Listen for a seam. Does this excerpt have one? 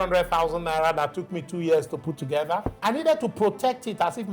yes; 1 cut; at 2.7 s

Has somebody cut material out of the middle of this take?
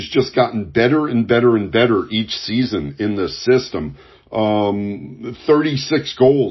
no; 0 cuts

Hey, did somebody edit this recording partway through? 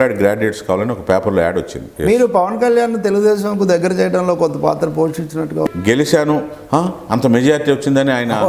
yes; 2 cuts; at 1.9 s, 5.7 s

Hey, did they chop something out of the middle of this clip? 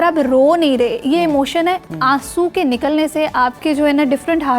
yes; 2 cuts; at 1.9 s, 3.6 s

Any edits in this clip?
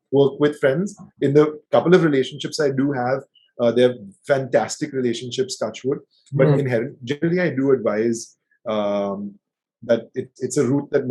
no; 0 cuts

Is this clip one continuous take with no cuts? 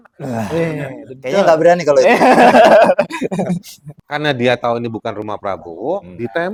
yes; 0 cuts

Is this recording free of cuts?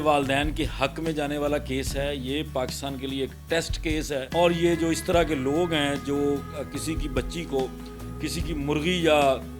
no; 1 cut; at 4.3 s

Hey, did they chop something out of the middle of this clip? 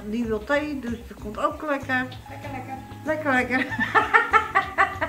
no; 0 cuts

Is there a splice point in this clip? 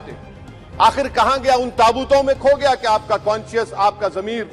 no; 0 cuts

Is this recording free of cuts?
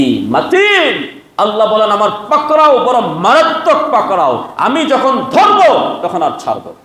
yes; 0 cuts

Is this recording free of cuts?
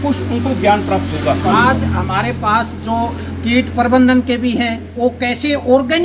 no; 1 cut; at 1.5 s

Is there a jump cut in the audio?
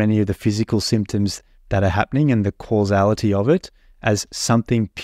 no; 0 cuts

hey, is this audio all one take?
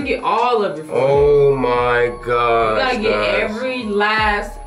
yes; 0 cuts

